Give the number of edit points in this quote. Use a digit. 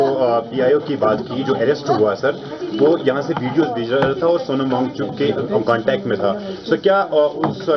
0